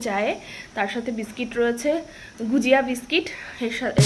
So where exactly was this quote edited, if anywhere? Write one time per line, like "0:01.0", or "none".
none